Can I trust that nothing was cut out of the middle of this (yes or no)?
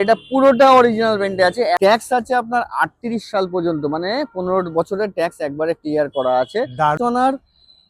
no